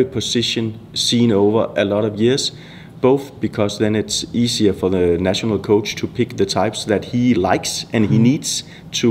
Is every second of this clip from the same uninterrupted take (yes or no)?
yes